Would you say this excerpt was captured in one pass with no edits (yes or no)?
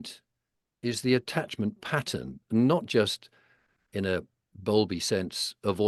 yes